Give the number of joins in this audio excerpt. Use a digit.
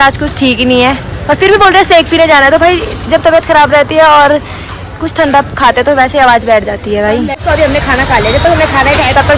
1